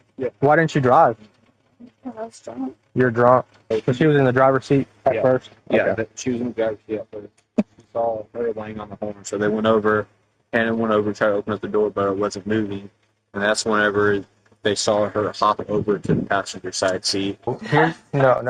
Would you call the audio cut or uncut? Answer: cut